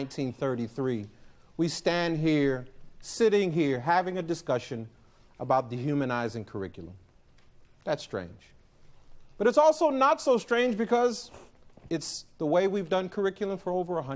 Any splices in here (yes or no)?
no